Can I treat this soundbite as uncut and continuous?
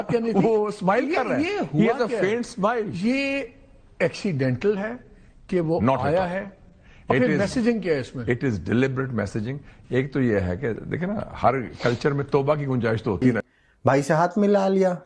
no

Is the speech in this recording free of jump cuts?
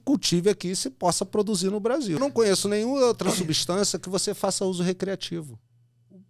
no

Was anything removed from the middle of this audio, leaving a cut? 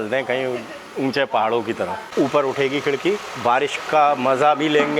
yes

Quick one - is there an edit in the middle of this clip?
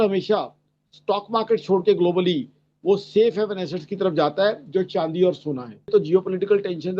yes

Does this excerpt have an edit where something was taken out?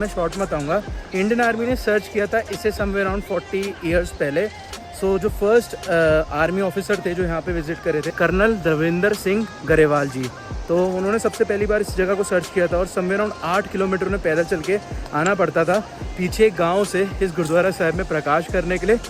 no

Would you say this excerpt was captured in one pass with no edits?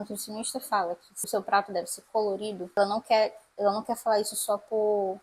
no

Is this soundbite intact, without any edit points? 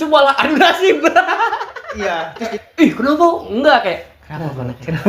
no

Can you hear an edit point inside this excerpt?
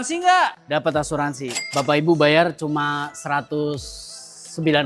yes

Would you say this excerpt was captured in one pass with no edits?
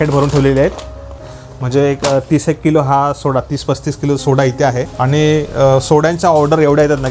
no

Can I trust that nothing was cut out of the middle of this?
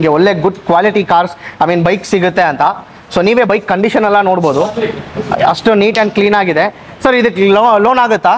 yes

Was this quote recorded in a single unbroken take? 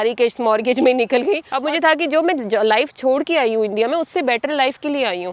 no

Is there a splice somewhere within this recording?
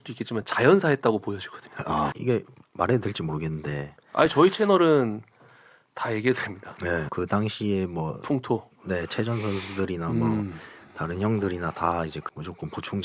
yes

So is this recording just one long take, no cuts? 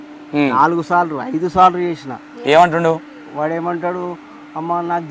yes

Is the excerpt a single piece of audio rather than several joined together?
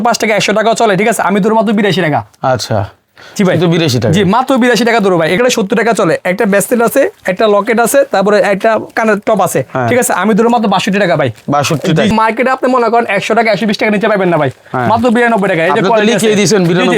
no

